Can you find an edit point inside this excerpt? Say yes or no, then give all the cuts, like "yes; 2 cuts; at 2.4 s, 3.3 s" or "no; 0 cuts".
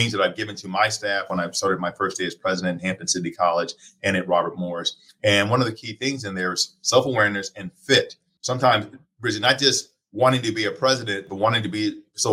yes; 1 cut; at 8.3 s